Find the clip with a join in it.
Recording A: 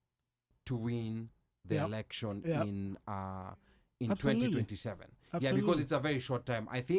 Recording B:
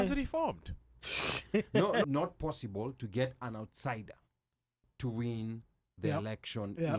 B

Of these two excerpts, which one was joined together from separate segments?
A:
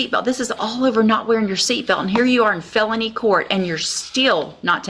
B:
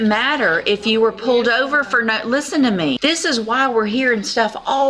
B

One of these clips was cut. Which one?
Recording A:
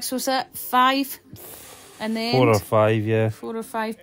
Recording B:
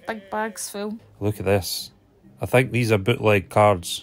B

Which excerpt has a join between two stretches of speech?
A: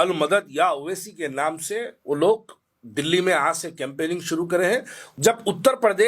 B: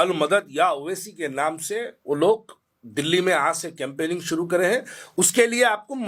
A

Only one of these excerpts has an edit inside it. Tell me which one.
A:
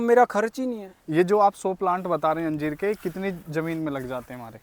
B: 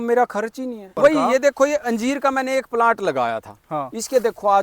B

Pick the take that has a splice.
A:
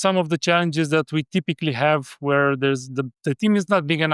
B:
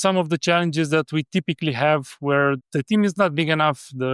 B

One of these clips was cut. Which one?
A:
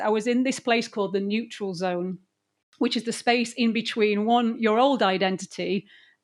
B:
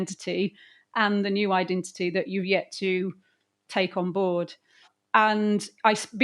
B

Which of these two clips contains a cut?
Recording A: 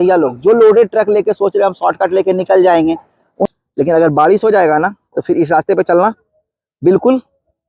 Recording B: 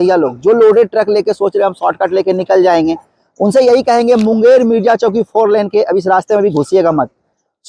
A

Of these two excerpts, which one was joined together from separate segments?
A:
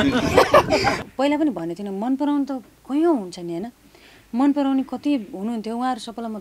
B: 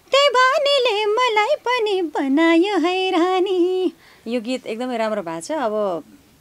A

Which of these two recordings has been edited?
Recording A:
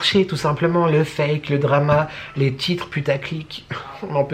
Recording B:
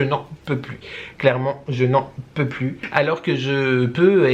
B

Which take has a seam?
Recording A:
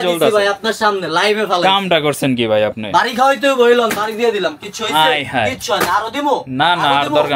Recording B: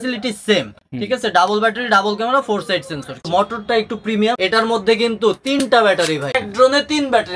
B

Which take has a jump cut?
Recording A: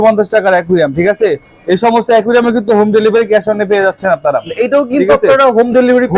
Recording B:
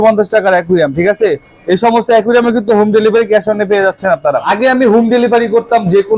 B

